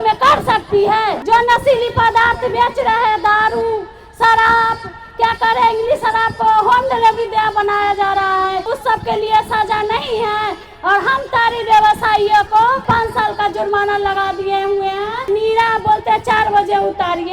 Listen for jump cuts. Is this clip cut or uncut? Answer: cut